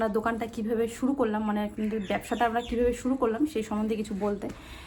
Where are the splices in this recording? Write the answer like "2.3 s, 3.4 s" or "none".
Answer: none